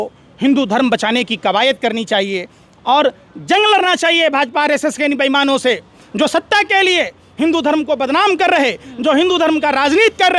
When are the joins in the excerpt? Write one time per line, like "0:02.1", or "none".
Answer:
none